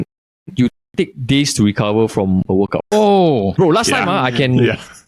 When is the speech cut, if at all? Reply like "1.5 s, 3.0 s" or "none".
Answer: 2.9 s